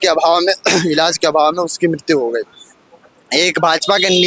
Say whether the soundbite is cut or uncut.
uncut